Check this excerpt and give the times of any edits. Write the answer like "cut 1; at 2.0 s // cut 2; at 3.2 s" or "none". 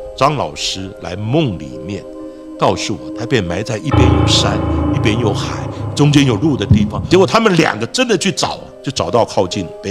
cut 1; at 7.0 s